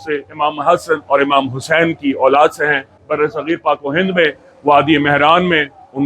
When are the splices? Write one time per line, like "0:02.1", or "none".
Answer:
0:03.0